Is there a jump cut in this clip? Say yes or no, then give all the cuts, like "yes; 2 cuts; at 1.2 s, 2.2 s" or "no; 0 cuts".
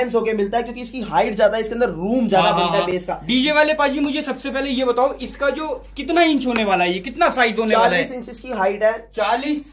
no; 0 cuts